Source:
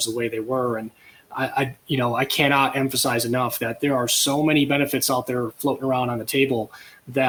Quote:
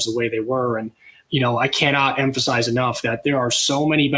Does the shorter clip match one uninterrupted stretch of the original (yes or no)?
no